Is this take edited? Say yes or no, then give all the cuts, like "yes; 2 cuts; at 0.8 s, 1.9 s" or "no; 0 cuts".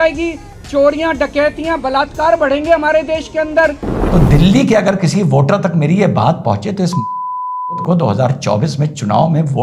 yes; 1 cut; at 3.9 s